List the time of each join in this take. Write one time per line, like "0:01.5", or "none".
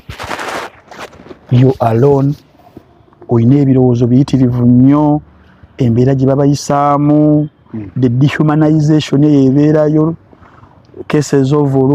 none